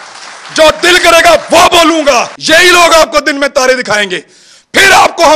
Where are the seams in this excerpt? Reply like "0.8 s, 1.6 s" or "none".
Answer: 2.4 s